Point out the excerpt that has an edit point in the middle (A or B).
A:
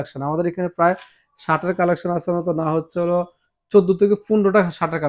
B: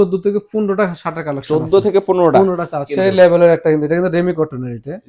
B